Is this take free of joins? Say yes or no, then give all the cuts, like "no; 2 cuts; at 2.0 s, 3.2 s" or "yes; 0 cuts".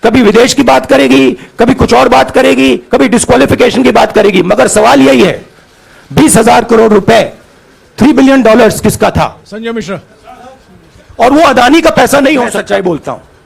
no; 2 cuts; at 9.4 s, 12.6 s